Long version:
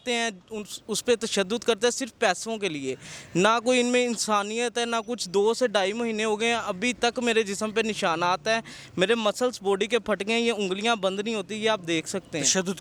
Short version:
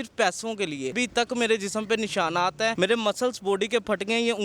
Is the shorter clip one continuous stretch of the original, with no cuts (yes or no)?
no